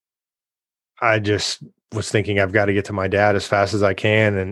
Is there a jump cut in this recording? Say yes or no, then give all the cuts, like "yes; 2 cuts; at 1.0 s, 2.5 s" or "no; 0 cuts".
no; 0 cuts